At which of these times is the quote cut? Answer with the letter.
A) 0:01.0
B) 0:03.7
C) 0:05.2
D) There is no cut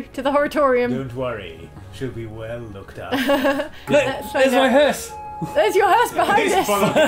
B